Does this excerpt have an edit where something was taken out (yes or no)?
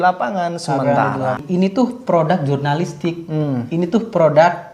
yes